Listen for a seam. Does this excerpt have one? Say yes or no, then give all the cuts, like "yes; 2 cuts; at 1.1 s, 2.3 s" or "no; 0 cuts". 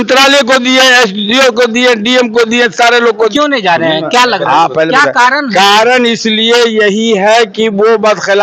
yes; 1 cut; at 3.3 s